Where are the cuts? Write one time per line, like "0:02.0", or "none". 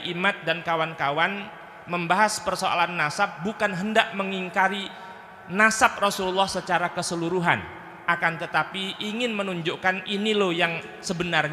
none